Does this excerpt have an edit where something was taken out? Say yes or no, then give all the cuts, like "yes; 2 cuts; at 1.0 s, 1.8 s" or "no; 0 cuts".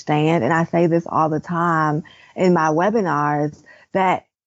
no; 0 cuts